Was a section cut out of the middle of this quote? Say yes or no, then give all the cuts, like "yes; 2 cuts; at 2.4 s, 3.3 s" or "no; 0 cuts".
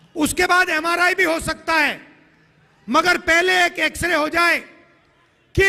no; 0 cuts